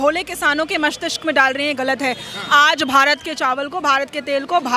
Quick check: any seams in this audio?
no; 0 cuts

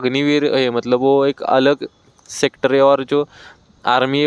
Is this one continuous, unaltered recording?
yes; 0 cuts

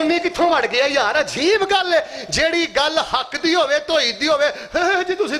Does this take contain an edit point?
no; 0 cuts

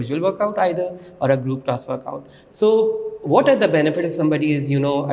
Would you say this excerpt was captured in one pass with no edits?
yes; 0 cuts

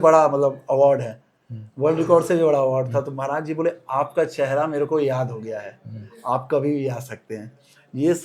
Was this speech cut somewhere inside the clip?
no; 0 cuts

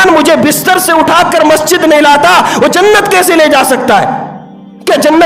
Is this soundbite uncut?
yes; 0 cuts

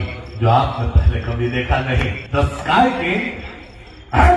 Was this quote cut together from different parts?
yes; 1 cut; at 2.2 s

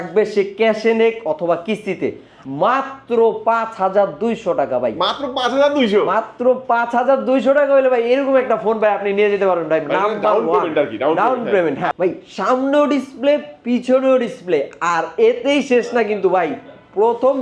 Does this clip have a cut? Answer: yes; 2 cuts; at 2.4 s, 11.9 s

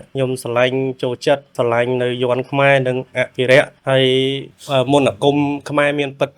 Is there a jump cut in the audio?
yes; 1 cut; at 4.5 s

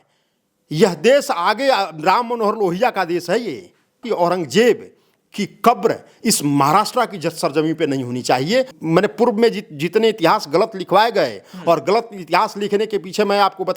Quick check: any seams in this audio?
yes; 2 cuts; at 4.0 s, 8.7 s

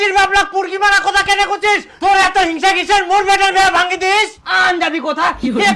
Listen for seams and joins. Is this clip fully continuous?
yes; 0 cuts

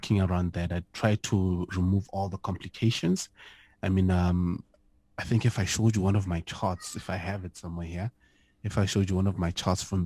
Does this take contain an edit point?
no; 0 cuts

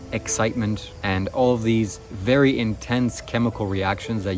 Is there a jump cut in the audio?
no; 0 cuts

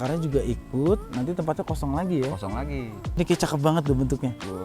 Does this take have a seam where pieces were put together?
yes; 1 cut; at 3.0 s

